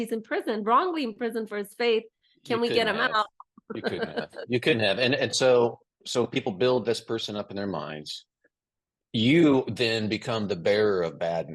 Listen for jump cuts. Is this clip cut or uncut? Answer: uncut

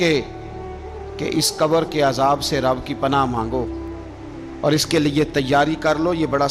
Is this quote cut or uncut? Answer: uncut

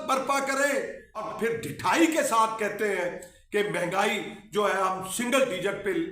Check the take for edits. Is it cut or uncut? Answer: cut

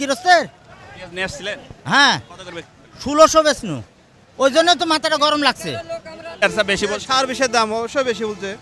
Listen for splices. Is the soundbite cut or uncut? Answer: cut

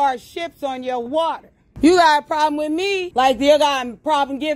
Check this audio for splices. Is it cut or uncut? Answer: cut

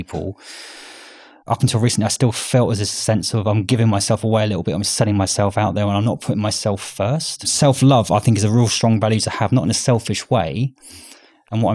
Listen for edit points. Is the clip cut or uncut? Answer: cut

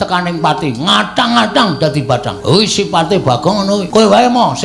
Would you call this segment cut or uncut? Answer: cut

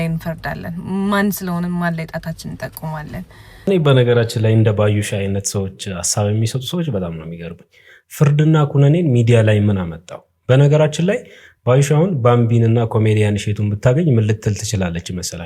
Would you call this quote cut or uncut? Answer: cut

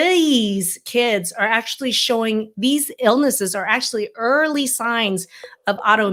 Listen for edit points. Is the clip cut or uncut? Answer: uncut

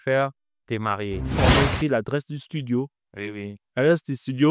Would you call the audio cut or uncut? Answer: cut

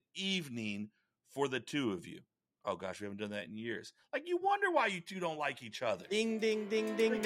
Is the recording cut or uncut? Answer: uncut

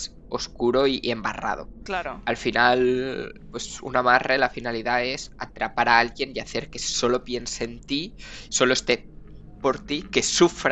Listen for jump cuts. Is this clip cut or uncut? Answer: cut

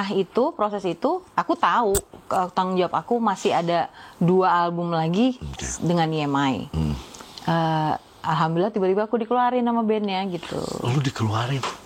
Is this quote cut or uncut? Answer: uncut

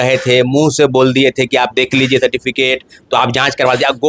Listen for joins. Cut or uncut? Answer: uncut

